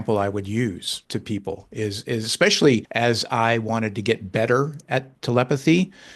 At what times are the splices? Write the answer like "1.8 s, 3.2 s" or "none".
0.9 s, 2.9 s, 5.1 s